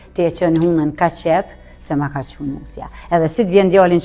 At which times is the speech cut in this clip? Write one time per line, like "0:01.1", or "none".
none